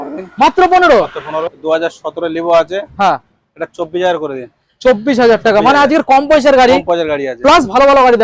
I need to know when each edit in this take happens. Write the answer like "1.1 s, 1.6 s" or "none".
1.6 s